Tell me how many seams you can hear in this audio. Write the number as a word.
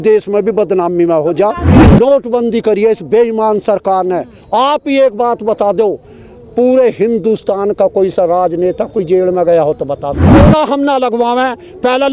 two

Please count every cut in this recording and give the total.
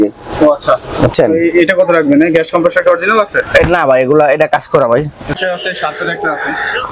one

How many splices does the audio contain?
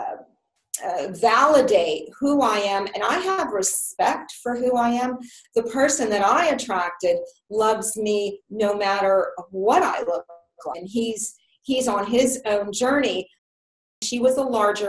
two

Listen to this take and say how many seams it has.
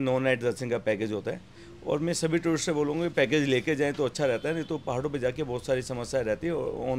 zero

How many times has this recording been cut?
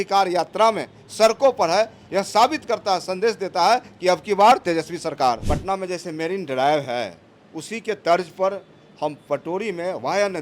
one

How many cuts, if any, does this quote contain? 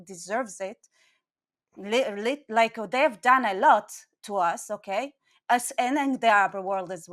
zero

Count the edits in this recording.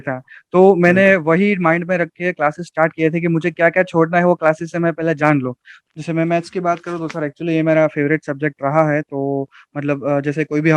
one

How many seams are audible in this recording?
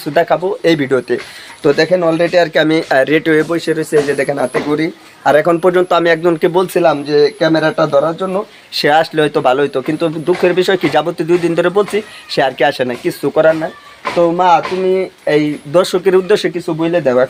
zero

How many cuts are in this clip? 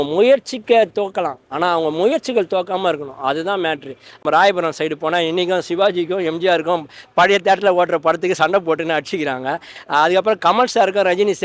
one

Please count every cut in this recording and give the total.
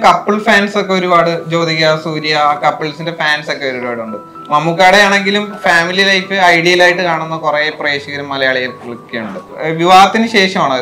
one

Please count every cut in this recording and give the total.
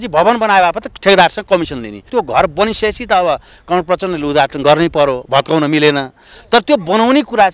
one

